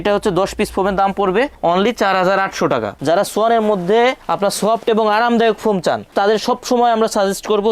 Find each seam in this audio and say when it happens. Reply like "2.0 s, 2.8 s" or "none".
2.9 s